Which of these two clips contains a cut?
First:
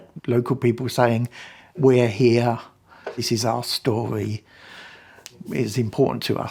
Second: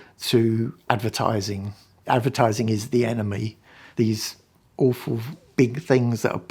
second; 1 cut; at 5.3 s

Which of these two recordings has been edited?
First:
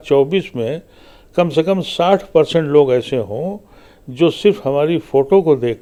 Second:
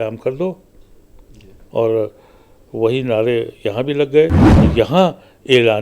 second; 1 cut; at 4.5 s

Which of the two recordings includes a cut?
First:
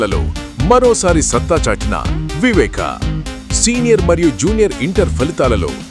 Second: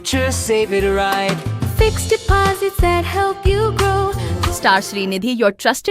second; 1 cut; at 4.3 s

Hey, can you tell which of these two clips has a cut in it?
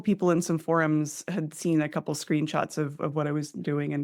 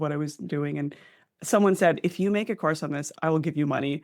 second; 1 cut; at 3.1 s

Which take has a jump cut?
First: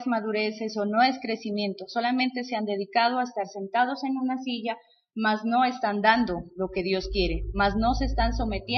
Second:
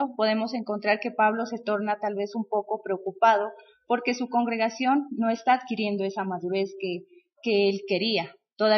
second; 1 cut; at 1.0 s

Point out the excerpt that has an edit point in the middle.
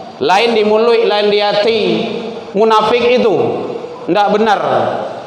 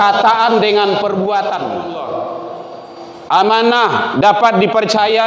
second; 1 cut; at 1.8 s

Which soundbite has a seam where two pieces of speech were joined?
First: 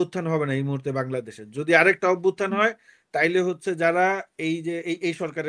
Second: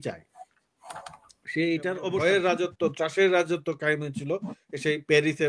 second; 1 cut; at 2.2 s

